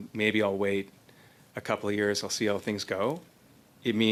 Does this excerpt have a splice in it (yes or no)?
no